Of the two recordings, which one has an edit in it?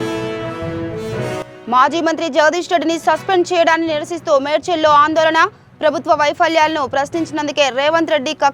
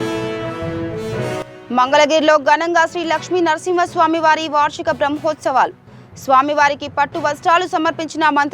second; 1 cut; at 1.4 s

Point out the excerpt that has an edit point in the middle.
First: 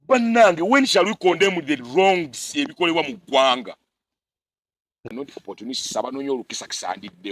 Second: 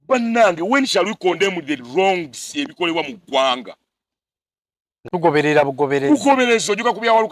first; 1 cut; at 5.1 s

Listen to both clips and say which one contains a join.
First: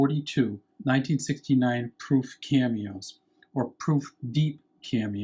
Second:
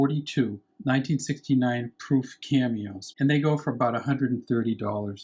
second; 1 cut; at 3.0 s

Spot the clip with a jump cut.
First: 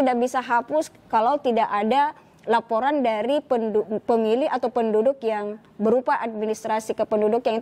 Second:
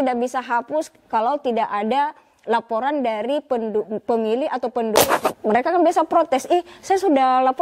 second; 1 cut; at 5.0 s

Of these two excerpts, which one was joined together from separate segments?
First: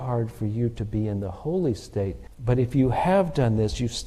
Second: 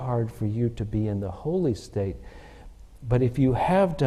first; 1 cut; at 2.3 s

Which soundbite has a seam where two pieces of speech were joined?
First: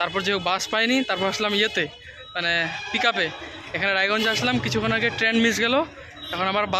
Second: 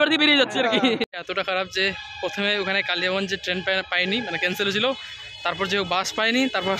second; 1 cut; at 1.1 s

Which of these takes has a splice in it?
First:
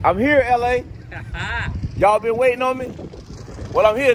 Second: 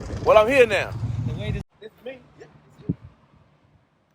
second; 1 cut; at 1.6 s

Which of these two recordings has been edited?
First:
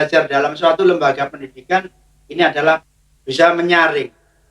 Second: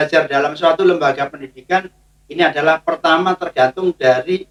first; 1 cut; at 2.8 s

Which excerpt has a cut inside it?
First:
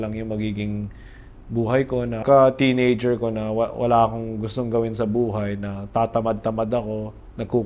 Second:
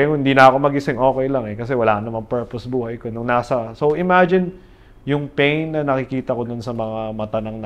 first; 1 cut; at 2.2 s

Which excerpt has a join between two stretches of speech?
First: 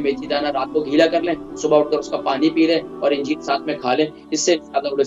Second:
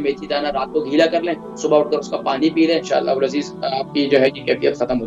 second; 1 cut; at 2.9 s

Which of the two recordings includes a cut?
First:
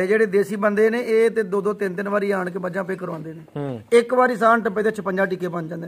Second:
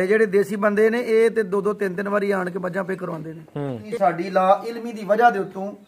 second; 1 cut; at 3.8 s

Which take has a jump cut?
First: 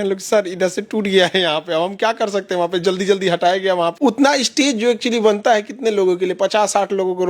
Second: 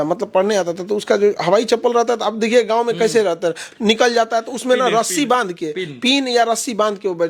first; 1 cut; at 3.9 s

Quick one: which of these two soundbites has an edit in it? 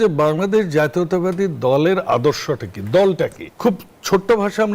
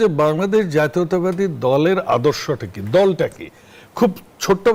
first; 1 cut; at 3.4 s

